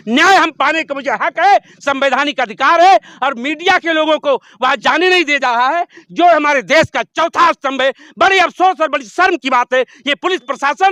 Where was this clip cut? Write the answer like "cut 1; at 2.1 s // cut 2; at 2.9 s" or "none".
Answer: none